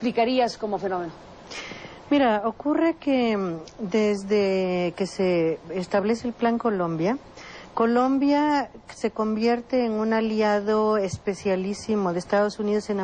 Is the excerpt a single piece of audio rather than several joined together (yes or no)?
yes